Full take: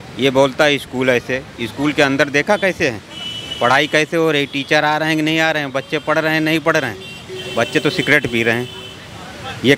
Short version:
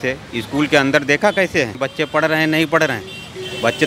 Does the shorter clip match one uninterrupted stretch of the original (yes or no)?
no